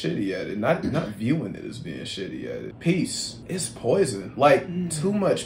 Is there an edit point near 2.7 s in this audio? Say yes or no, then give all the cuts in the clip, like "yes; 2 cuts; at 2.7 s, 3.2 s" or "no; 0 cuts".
yes; 2 cuts; at 2.7 s, 3.3 s